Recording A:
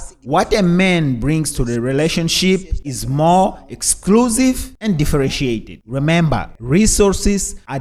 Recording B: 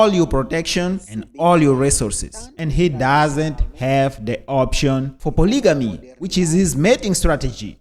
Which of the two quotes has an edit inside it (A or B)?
B